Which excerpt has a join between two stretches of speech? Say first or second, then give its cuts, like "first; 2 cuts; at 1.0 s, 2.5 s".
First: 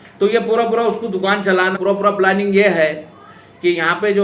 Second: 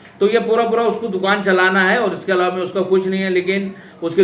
first; 1 cut; at 1.7 s